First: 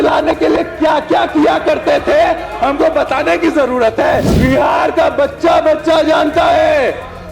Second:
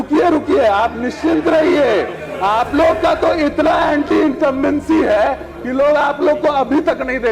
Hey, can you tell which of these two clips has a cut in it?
first; 1 cut; at 4.3 s

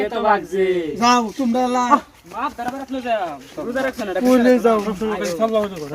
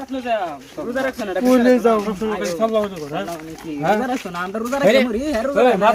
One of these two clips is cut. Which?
first; 1 cut; at 1.9 s

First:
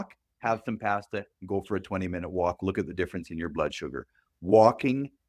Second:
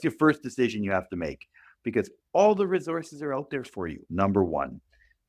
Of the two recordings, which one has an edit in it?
second; 1 cut; at 4.0 s

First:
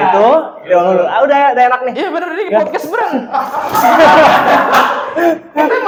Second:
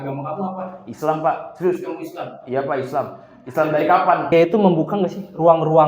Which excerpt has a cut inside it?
second; 1 cut; at 4.3 s

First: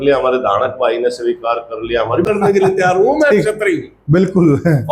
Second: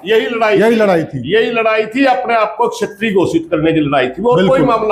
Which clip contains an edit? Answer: first; 1 cut; at 2.3 s

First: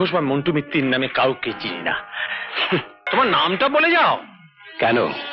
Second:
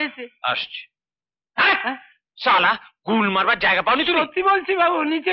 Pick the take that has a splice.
first; 1 cut; at 3.1 s

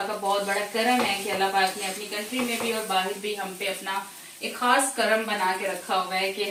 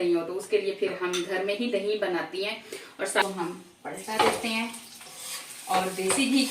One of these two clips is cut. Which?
second; 1 cut; at 3.2 s

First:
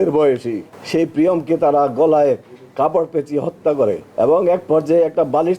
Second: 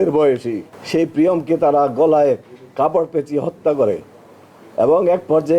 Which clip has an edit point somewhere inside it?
first; 1 cut; at 4.0 s

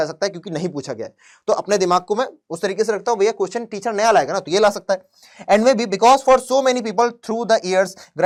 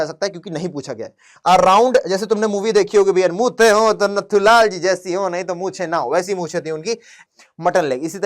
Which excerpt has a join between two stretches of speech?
second; 2 cuts; at 1.3 s, 7.2 s

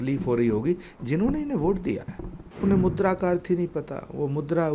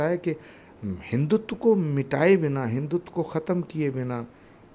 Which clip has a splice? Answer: first; 1 cut; at 2.6 s

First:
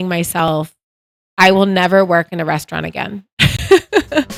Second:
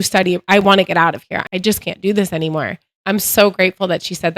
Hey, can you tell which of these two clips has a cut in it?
second; 2 cuts; at 1.3 s, 3.0 s

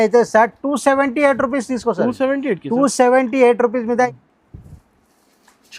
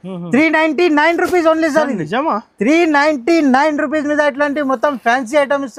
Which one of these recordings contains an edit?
first; 1 cut; at 4.1 s

